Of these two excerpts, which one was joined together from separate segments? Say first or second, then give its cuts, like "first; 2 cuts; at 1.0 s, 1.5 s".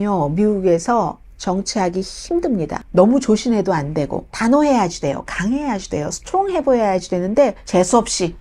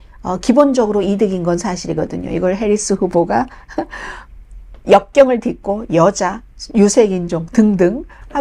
first; 3 cuts; at 2.8 s, 4.2 s, 7.6 s